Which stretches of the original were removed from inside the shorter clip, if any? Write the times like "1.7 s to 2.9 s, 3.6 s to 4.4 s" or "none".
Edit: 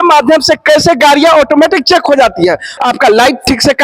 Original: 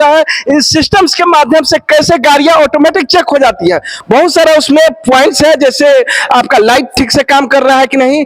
3.9 s to 6.2 s